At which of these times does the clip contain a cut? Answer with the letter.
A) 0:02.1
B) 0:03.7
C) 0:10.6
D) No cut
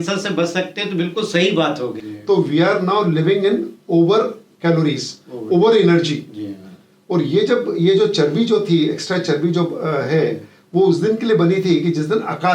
A